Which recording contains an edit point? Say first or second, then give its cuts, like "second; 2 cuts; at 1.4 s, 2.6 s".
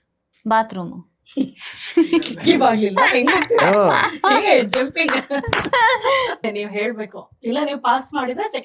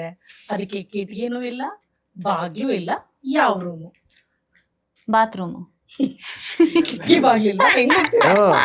first; 1 cut; at 6.5 s